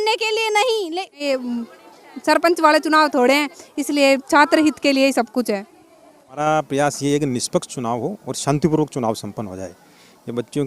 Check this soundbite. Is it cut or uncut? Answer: cut